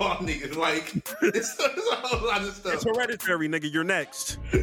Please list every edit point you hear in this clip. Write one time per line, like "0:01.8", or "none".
none